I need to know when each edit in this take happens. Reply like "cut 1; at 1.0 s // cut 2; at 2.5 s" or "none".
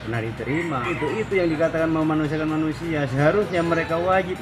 cut 1; at 0.9 s